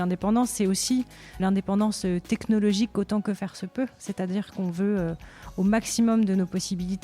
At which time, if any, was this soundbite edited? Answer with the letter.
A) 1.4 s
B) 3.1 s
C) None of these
A